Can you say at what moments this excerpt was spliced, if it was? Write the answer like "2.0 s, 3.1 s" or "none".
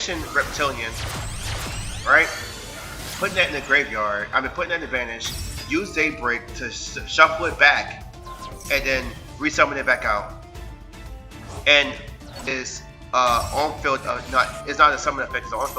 12.5 s